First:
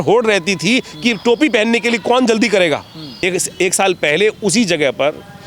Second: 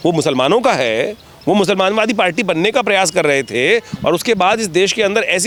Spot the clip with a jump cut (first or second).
first